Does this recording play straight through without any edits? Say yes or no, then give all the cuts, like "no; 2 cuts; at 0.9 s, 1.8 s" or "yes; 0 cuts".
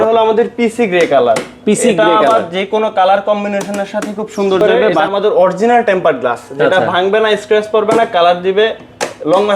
no; 1 cut; at 5.0 s